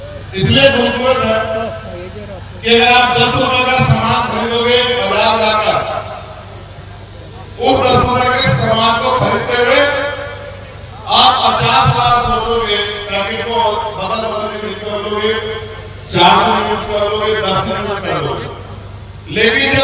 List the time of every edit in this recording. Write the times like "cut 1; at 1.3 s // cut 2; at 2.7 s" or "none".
cut 1; at 14.7 s

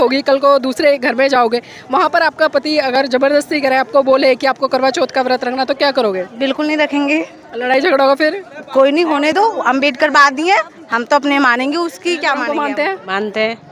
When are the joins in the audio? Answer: cut 1; at 12.4 s

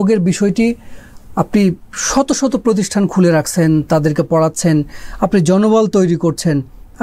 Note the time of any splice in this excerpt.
none

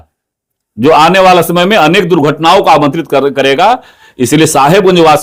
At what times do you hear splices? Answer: none

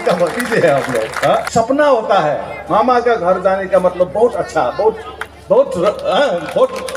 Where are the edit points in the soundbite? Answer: cut 1; at 1.5 s

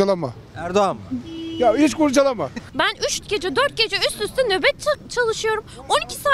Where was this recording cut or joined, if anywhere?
cut 1; at 2.7 s

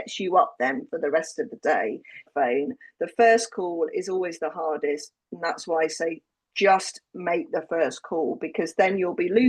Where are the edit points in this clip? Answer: cut 1; at 2.3 s

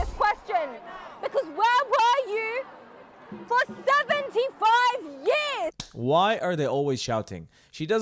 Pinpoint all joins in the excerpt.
cut 1; at 5.8 s

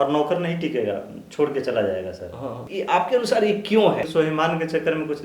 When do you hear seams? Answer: cut 1; at 2.7 s // cut 2; at 4.1 s

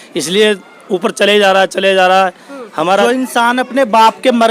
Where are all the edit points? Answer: cut 1; at 3.0 s

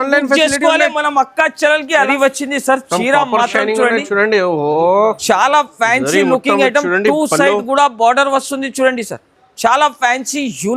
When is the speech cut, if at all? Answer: cut 1; at 2.1 s

